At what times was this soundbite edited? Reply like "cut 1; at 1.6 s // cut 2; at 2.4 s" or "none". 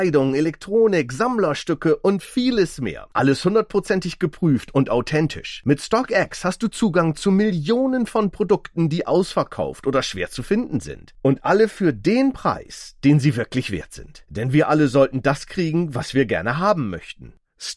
none